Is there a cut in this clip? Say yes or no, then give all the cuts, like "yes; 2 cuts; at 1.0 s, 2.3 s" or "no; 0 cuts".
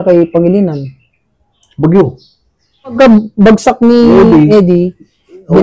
no; 0 cuts